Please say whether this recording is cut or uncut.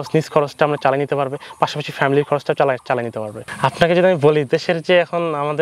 uncut